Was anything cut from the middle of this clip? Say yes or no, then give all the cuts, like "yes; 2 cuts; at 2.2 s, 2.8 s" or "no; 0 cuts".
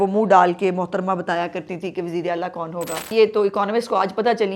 yes; 1 cut; at 3.1 s